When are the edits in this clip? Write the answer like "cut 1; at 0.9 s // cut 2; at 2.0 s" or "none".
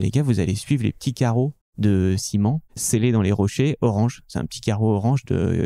cut 1; at 1.6 s // cut 2; at 2.7 s